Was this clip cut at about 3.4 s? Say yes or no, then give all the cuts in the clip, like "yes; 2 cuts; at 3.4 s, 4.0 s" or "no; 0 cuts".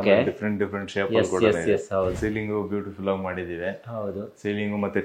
no; 1 cut; at 2.1 s